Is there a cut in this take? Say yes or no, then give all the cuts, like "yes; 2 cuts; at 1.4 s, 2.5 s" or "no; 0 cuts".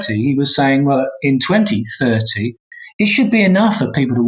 no; 0 cuts